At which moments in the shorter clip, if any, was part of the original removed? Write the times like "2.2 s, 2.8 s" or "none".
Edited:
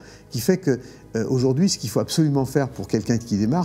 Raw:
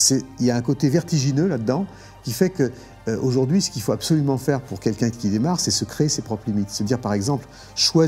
none